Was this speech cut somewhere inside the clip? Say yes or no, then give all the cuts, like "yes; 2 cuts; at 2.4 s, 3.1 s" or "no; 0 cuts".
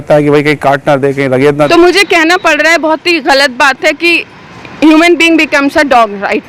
yes; 1 cut; at 1.7 s